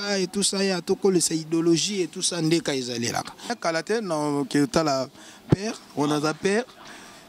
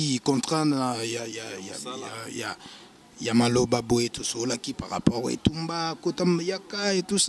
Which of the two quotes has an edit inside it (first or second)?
first